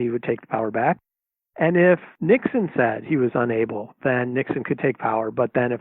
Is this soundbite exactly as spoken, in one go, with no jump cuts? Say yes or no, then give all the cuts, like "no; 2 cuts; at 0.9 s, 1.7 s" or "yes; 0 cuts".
no; 1 cut; at 2.1 s